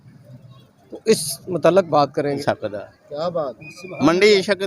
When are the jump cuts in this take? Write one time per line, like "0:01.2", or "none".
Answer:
0:02.4